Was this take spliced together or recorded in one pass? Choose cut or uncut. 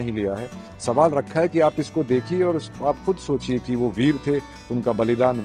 uncut